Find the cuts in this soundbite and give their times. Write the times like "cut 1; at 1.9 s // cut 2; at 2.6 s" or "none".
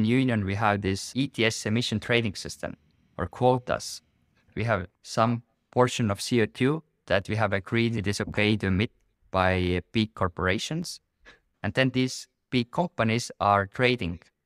cut 1; at 1.0 s // cut 2; at 4.6 s // cut 3; at 7.9 s // cut 4; at 11.4 s